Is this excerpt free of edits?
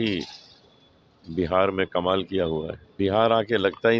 no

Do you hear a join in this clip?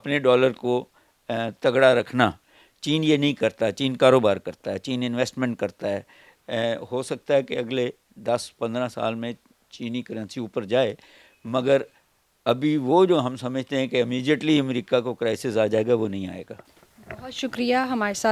no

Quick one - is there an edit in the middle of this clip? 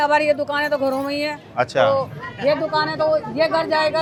no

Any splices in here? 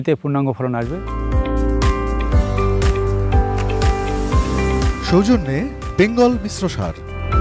yes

